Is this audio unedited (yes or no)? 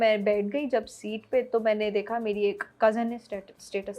yes